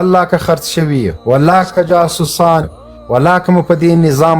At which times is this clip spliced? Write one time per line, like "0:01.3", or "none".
0:01.1